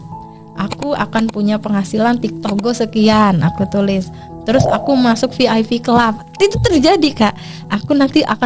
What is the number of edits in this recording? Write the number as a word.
zero